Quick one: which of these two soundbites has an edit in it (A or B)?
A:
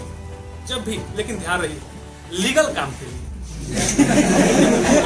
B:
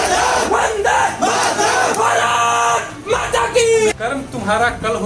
B